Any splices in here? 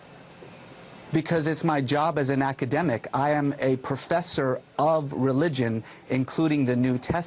no; 0 cuts

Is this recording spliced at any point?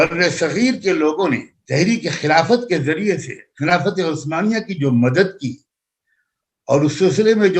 yes; 1 cut; at 1.5 s

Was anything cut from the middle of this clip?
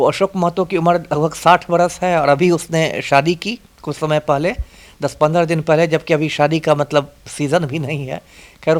no; 0 cuts

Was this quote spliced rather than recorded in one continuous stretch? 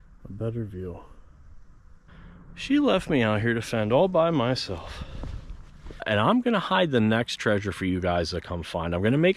yes; 2 cuts; at 2.1 s, 6.0 s

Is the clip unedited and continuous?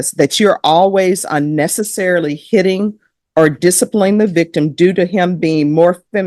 yes; 0 cuts

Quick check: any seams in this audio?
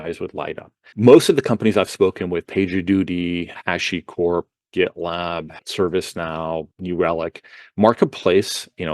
yes; 4 cuts; at 0.9 s, 3.6 s, 5.6 s, 6.7 s

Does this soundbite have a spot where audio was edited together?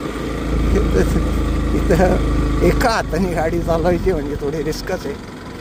no; 0 cuts

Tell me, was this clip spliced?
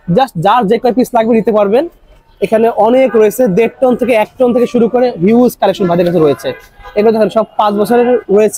no; 0 cuts

